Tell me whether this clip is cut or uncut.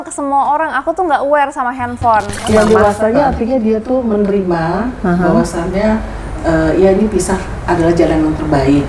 cut